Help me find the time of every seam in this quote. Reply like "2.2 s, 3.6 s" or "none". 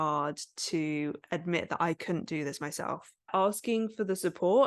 3.3 s